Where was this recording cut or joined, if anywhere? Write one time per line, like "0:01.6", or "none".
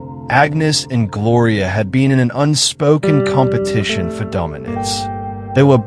none